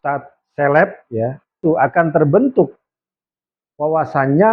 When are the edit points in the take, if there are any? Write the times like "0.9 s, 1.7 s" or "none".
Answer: 1.6 s